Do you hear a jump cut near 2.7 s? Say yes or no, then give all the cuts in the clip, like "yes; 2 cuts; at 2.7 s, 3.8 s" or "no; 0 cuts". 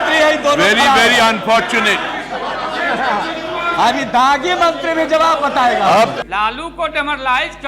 no; 1 cut; at 6.2 s